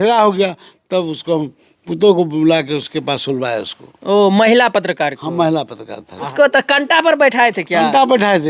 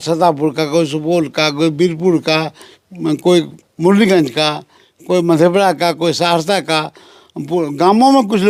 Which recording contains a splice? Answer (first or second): first